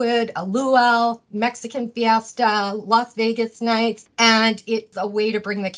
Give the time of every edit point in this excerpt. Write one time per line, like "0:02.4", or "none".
0:04.0
0:04.9